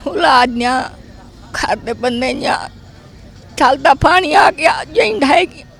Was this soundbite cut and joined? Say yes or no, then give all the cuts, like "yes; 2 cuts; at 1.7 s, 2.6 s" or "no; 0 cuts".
no; 0 cuts